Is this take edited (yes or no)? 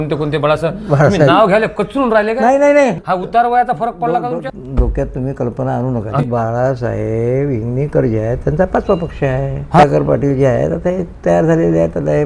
yes